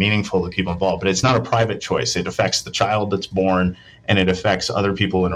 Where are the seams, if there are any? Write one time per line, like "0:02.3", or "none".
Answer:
0:01.2